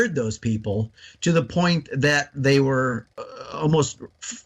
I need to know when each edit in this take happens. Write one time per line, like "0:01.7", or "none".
0:03.1